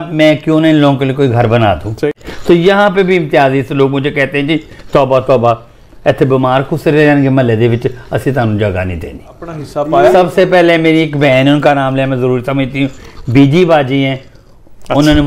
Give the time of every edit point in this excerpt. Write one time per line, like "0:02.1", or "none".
0:02.0
0:09.7